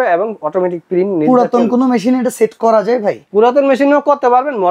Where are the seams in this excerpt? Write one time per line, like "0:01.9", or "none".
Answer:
none